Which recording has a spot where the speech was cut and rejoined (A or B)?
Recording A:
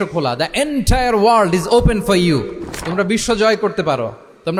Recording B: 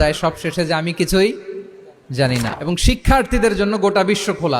B